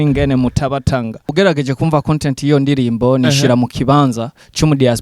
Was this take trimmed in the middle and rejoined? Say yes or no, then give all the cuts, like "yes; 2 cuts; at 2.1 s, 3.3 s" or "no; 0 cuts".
yes; 1 cut; at 1.3 s